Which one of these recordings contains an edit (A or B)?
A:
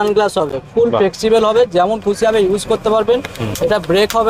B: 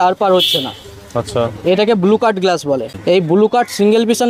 B